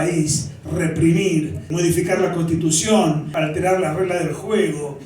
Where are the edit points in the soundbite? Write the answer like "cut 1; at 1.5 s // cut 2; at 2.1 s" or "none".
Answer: cut 1; at 1.7 s // cut 2; at 3.3 s